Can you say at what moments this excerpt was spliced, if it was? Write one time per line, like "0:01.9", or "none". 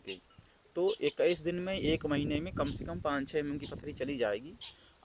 none